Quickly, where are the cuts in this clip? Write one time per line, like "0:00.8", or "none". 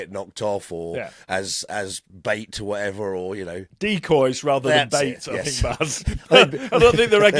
0:02.1
0:04.1